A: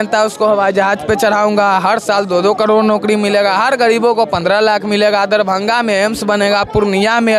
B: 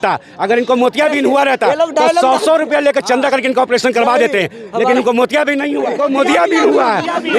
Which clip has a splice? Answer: B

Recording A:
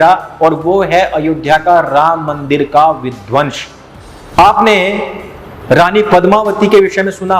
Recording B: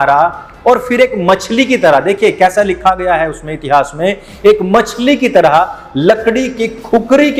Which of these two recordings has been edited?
A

